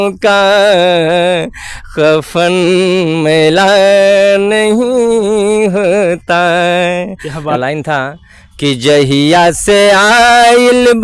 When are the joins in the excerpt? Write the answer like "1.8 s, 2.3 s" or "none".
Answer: 7.5 s